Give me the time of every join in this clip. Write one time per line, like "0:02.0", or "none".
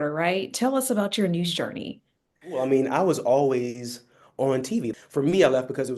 0:02.6
0:04.9